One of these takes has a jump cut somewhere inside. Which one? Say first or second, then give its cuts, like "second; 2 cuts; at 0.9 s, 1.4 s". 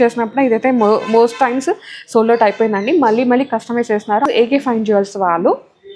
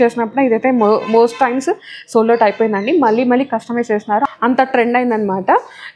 first; 1 cut; at 4.3 s